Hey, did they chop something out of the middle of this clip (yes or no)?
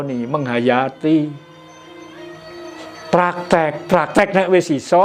no